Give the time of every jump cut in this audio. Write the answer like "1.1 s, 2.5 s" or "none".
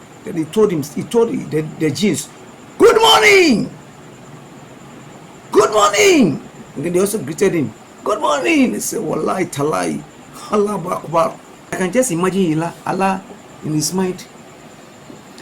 11.7 s